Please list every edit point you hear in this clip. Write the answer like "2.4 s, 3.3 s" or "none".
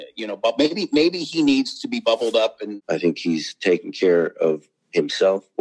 2.7 s